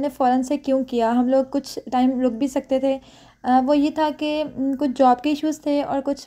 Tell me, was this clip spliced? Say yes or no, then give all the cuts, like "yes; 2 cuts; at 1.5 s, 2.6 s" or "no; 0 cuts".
no; 0 cuts